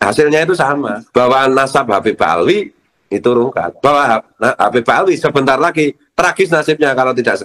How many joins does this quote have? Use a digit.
1